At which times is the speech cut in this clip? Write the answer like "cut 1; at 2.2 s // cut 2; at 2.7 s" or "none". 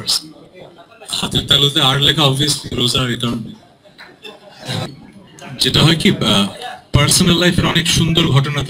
cut 1; at 4.9 s